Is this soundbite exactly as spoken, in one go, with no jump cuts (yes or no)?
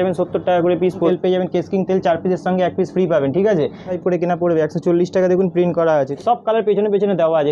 no